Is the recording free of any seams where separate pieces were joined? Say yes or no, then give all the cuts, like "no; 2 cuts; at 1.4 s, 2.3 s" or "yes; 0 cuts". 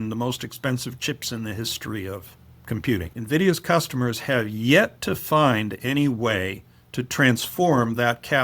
no; 1 cut; at 3.1 s